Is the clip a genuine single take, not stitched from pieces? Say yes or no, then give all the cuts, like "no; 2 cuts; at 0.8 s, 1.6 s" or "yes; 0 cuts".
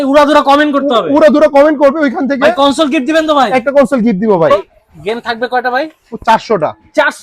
no; 1 cut; at 4.6 s